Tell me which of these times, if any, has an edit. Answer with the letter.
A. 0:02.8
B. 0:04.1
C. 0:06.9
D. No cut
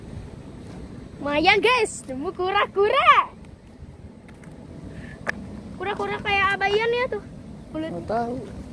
D